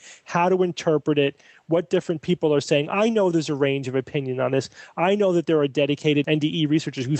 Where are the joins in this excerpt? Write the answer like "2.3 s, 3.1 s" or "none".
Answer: 6.3 s

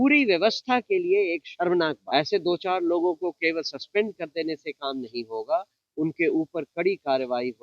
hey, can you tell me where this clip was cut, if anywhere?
2.0 s

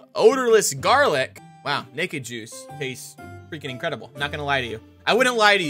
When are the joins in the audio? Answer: 1.5 s

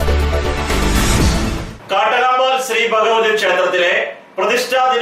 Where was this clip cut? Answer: 1.7 s

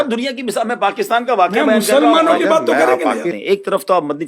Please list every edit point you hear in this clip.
3.3 s

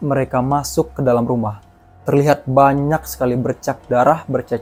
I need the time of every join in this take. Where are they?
none

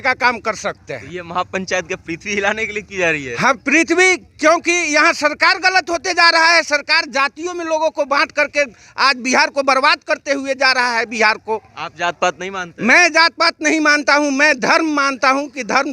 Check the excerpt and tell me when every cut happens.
none

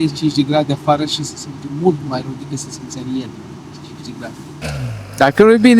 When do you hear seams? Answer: 4.6 s

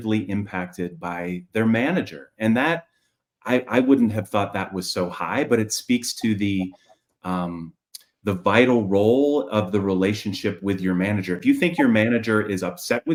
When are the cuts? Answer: none

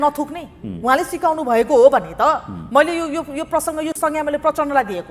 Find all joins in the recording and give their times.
none

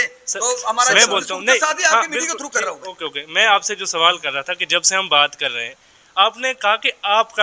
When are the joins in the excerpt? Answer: 0.9 s

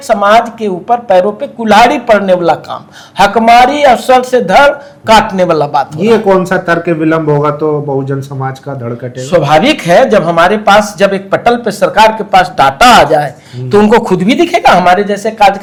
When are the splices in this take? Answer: none

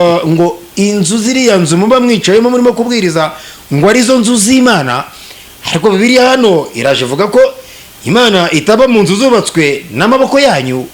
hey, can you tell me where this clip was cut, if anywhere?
none

